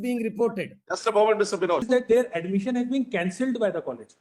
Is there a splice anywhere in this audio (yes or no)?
yes